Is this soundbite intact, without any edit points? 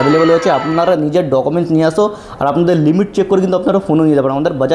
yes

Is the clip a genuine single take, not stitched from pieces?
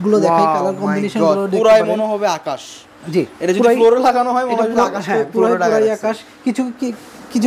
yes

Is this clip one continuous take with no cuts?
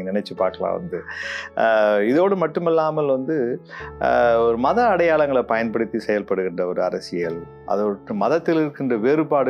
yes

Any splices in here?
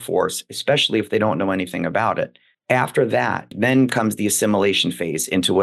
yes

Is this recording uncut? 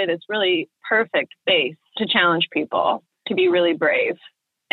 no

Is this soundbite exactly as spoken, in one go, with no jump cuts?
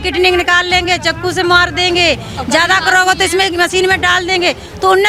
yes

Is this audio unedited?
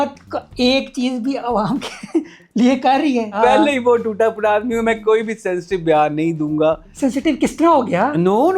no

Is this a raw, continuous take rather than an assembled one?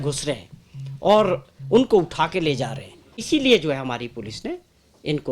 no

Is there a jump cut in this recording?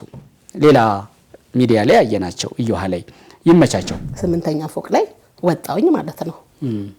yes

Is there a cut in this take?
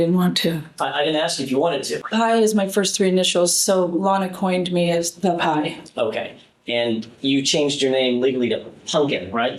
yes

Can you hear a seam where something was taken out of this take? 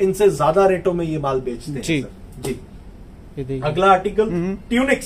no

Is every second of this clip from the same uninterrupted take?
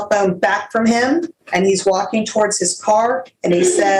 no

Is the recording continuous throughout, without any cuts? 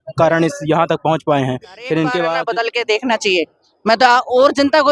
no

